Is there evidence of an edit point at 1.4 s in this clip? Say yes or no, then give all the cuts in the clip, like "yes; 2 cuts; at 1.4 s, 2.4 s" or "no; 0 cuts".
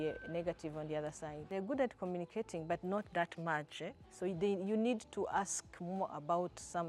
yes; 1 cut; at 1.4 s